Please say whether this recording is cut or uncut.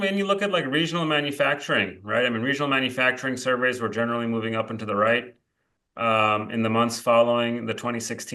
uncut